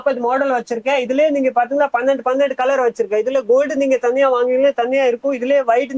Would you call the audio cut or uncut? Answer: uncut